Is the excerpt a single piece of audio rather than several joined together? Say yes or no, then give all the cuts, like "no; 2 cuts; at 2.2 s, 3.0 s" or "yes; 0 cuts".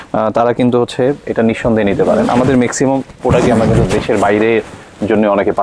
yes; 0 cuts